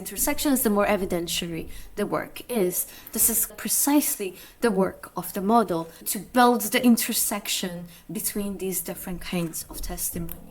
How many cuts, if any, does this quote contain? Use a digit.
2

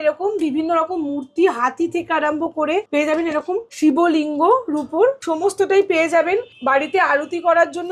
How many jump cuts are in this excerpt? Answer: 4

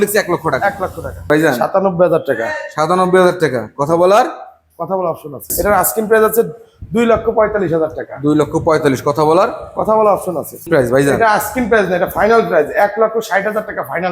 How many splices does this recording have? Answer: 3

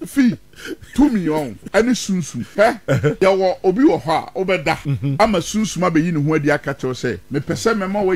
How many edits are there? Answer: 4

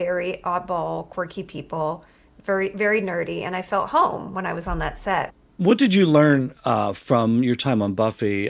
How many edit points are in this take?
1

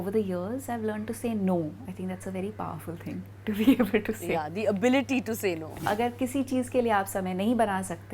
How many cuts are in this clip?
2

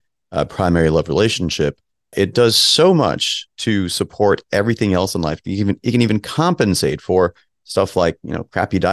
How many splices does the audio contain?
0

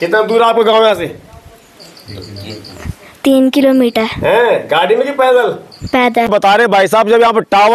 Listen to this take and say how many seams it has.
1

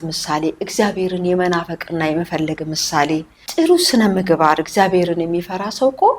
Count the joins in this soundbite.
1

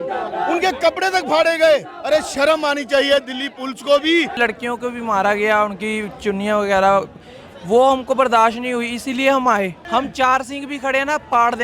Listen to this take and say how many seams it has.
2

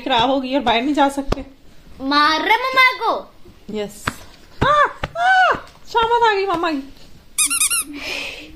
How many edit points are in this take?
0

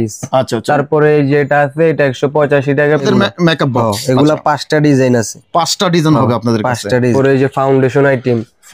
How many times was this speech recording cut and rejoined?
2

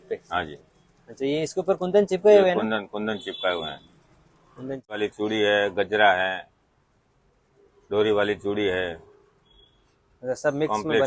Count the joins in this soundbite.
1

